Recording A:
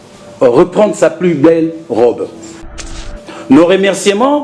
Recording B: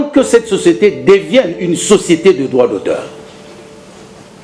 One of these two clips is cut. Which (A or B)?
A